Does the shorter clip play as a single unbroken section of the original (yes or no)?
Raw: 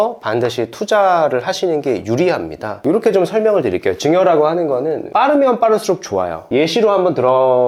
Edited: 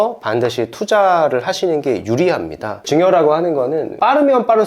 no